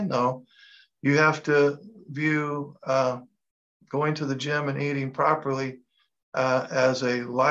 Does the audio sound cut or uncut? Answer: uncut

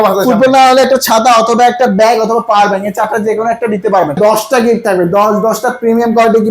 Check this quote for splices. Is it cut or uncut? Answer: cut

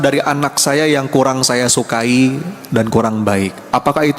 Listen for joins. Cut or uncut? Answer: cut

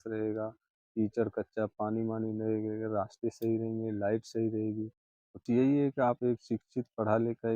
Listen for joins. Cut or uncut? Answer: cut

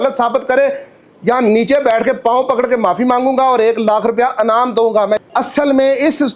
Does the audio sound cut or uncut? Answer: cut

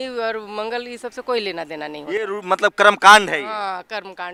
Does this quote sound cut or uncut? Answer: uncut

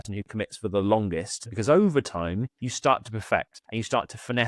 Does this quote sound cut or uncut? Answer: cut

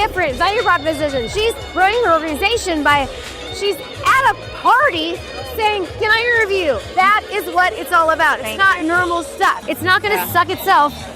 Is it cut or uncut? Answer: cut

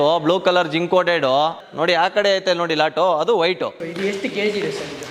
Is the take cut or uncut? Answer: cut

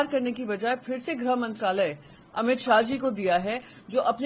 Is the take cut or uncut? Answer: uncut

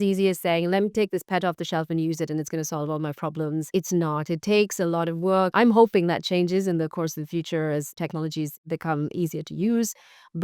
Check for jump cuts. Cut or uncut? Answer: cut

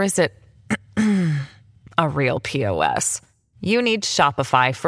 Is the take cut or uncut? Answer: uncut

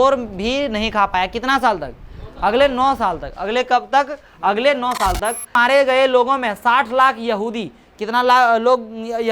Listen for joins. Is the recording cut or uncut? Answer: cut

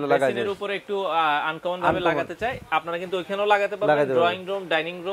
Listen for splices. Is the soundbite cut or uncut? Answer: uncut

